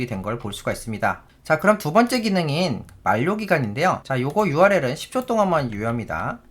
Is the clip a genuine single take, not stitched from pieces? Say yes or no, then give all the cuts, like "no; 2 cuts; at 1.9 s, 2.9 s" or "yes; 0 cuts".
no; 1 cut; at 4.0 s